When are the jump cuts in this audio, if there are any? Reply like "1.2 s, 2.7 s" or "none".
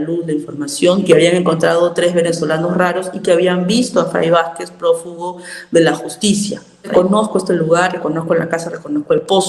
1.1 s, 6.9 s